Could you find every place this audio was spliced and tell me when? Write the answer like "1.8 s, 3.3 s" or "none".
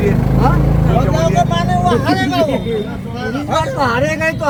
none